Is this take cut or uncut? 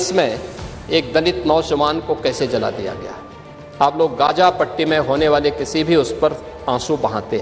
uncut